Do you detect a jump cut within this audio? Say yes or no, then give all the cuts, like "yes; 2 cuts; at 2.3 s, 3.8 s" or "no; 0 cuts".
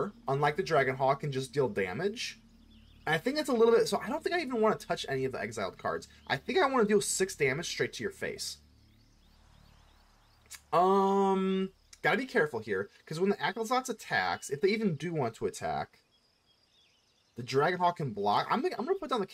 no; 0 cuts